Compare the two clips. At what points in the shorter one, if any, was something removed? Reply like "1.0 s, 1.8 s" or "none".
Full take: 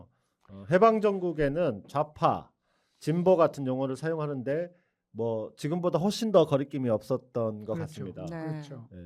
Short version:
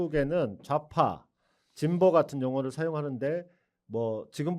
none